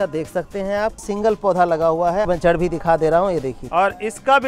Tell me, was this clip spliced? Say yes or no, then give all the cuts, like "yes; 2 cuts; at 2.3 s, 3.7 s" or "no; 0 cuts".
yes; 3 cuts; at 1.1 s, 2.3 s, 3.6 s